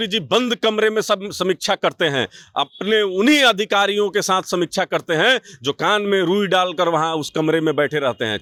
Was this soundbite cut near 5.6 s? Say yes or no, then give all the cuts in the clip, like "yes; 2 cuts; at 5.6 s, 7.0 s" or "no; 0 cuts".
no; 0 cuts